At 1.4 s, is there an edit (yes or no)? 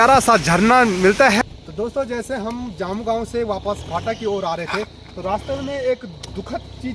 yes